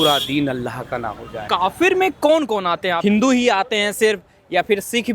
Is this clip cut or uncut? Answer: cut